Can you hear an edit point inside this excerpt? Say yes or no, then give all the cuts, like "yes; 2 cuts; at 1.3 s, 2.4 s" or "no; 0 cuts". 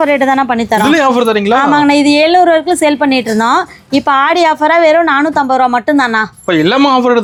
no; 0 cuts